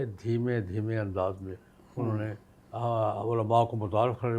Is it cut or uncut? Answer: uncut